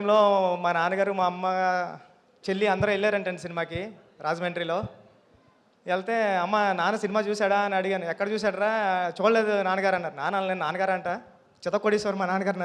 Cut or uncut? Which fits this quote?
uncut